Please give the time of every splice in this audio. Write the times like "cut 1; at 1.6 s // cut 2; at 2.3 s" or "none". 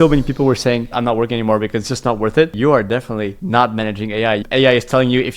cut 1; at 0.9 s // cut 2; at 2.5 s